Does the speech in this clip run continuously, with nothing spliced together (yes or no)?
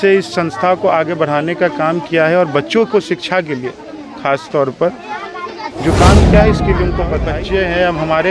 no